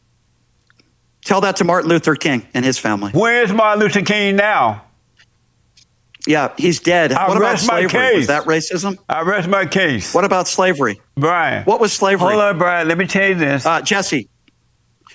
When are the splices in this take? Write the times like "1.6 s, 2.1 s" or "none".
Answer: 3.3 s